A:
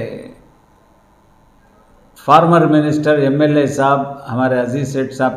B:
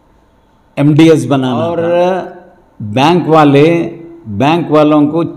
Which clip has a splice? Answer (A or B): B